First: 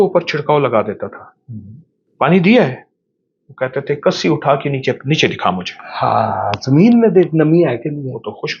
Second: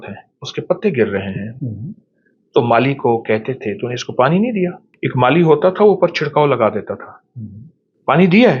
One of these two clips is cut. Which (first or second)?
second